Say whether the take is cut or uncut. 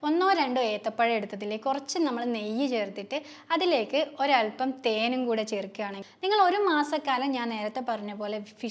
cut